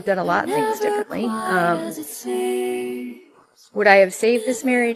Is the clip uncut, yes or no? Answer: yes